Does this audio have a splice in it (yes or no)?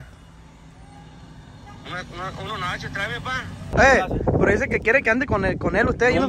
yes